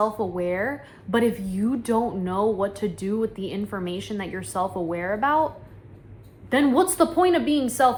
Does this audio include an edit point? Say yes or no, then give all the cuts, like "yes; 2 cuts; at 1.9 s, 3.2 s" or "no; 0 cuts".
no; 0 cuts